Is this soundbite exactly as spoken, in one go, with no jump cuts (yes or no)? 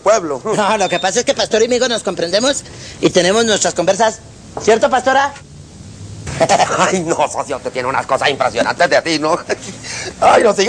yes